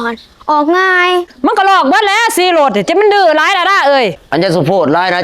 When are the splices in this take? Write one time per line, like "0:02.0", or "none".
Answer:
0:01.3
0:04.2